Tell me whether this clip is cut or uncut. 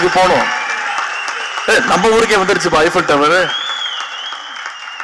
uncut